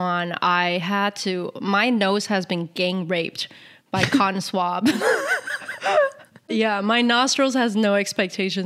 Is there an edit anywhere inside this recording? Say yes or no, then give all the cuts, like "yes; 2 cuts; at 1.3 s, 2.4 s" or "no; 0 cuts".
yes; 1 cut; at 6.5 s